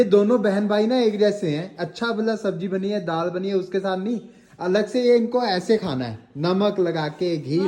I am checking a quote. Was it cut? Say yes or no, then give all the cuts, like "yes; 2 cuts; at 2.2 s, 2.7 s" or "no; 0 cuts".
no; 0 cuts